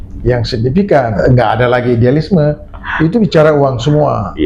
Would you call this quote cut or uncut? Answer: cut